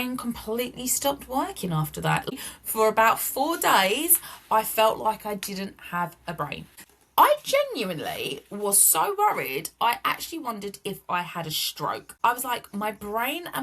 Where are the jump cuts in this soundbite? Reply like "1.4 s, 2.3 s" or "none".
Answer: 2.3 s, 6.7 s, 12.1 s